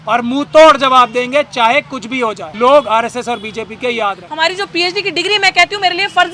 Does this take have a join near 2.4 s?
yes; 2 cuts; at 2.4 s, 4.2 s

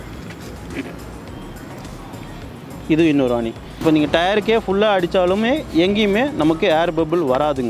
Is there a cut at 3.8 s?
yes; 1 cut; at 3.8 s

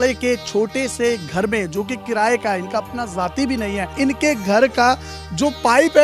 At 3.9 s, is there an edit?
yes; 1 cut; at 3.9 s

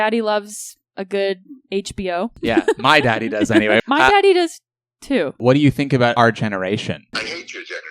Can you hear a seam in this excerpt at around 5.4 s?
yes; 2 cuts; at 3.8 s, 5.4 s

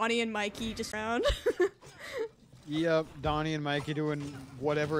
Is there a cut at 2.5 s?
no; 1 cut; at 0.9 s

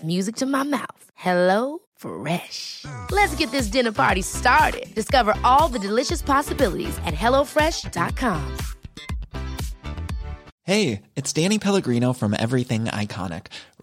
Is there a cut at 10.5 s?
yes; 1 cut; at 10.5 s

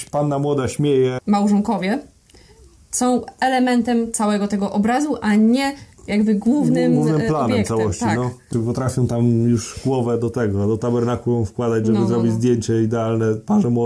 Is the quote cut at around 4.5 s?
no; 2 cuts; at 1.2 s, 8.4 s

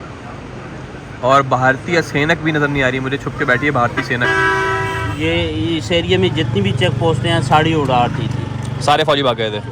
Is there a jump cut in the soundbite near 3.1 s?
no; 1 cut; at 5.0 s

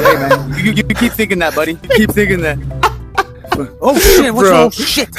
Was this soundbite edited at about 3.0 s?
no; 1 cut; at 1.8 s

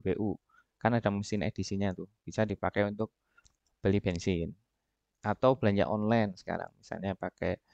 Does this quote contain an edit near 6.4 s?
no; 0 cuts

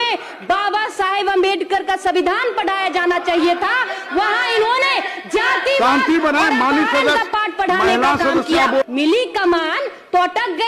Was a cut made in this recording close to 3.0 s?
no; 1 cut; at 8.8 s

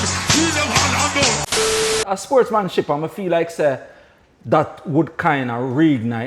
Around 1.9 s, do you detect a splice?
yes; 1 cut; at 1.9 s

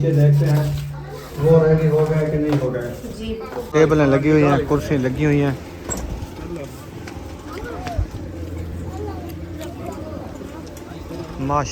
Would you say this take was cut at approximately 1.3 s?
no; 1 cut; at 3.7 s

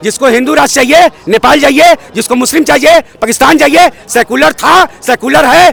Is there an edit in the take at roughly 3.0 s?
no; 0 cuts

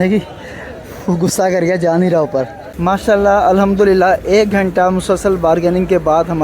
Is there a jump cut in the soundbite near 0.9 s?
no; 1 cut; at 2.6 s

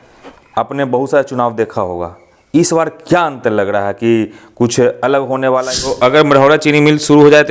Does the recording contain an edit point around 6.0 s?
yes; 1 cut; at 6.0 s

